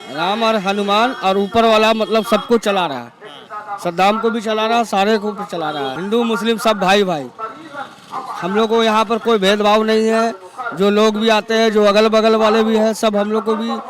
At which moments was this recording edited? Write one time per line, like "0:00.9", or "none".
0:06.0